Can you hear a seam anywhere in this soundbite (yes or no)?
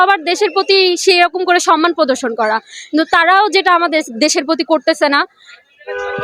no